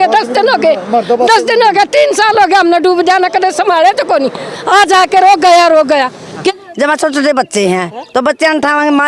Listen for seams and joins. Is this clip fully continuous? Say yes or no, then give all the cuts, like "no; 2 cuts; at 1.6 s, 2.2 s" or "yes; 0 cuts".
no; 1 cut; at 6.4 s